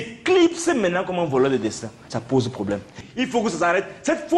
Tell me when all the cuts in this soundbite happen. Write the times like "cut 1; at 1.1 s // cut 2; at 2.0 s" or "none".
cut 1; at 3.0 s

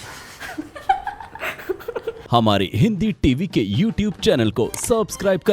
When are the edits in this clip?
cut 1; at 2.2 s

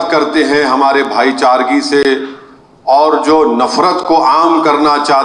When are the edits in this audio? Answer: none

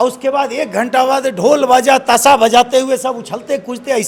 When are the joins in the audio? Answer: none

